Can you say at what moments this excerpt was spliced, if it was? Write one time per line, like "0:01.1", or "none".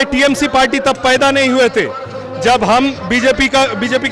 none